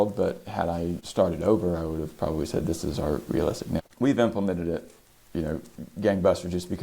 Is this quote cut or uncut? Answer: cut